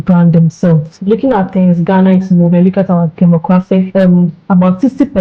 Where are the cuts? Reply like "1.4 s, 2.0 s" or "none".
0.9 s, 3.9 s